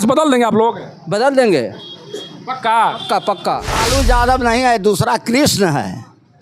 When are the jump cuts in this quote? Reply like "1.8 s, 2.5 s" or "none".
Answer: 3.8 s

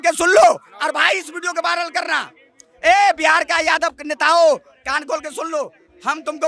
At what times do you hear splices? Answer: none

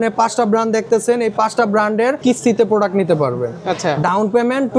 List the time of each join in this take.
2.2 s

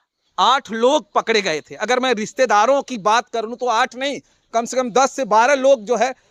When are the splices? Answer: none

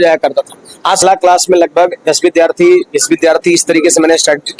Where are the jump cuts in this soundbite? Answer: 1.0 s

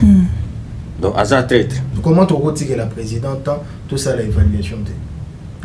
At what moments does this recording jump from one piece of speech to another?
1.8 s

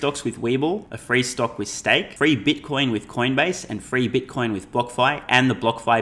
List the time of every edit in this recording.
0.9 s, 2.1 s

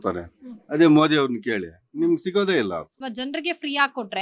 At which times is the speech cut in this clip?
3.0 s

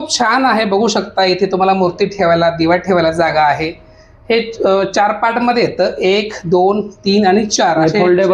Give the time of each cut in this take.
none

